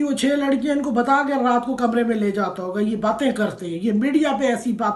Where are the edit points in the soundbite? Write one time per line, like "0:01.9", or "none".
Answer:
none